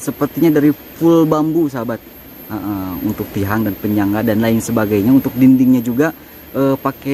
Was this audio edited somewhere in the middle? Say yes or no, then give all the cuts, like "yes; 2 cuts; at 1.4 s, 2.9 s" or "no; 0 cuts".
no; 0 cuts